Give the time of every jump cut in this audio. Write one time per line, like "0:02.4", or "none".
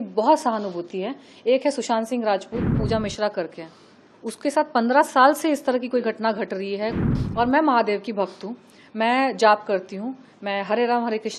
0:02.8
0:07.1

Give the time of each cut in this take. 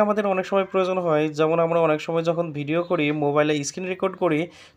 none

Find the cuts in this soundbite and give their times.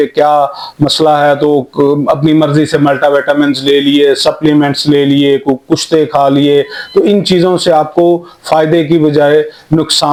none

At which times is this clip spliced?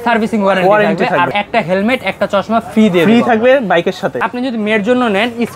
0:01.3
0:04.2

